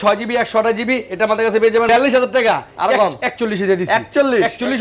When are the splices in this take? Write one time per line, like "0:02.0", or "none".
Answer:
0:01.9